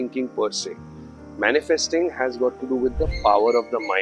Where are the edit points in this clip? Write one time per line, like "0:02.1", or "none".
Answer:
none